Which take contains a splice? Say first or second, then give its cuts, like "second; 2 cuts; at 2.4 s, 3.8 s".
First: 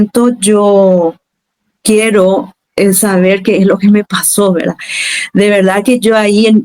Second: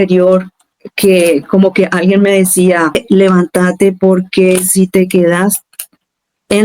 second; 1 cut; at 3.0 s